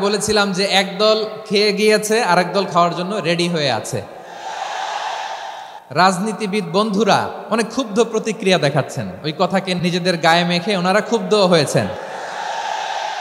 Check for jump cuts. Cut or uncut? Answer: cut